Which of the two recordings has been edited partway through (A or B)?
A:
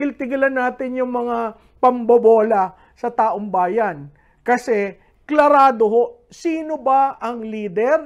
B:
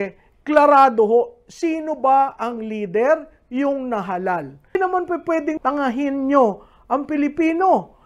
B